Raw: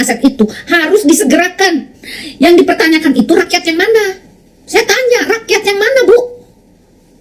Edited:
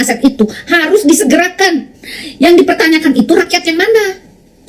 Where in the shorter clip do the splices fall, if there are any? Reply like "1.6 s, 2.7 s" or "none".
none